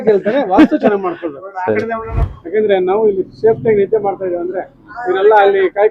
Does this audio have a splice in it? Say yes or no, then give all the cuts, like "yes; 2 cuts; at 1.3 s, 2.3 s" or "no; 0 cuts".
yes; 1 cut; at 2.2 s